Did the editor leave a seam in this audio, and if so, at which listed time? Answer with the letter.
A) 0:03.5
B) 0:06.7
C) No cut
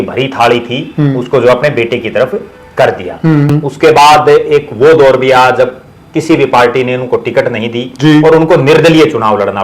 A